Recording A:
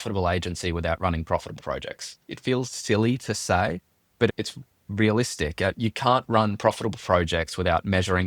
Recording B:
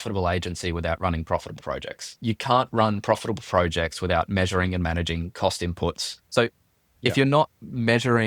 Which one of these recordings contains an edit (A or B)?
B